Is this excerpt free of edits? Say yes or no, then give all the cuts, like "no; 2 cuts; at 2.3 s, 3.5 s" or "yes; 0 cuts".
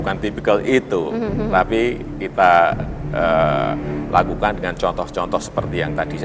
yes; 0 cuts